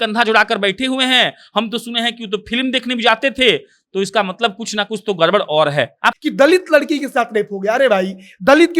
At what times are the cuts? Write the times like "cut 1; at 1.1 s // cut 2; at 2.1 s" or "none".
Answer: cut 1; at 6.2 s